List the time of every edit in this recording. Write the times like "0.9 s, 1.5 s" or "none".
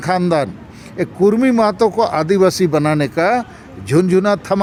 none

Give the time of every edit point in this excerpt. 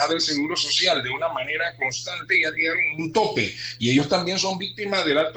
none

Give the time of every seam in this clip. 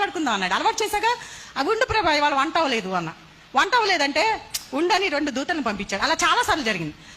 1.4 s

